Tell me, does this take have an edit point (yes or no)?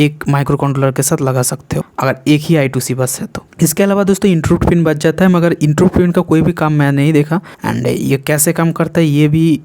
no